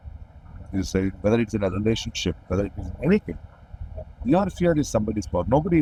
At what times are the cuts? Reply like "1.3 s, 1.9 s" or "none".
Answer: none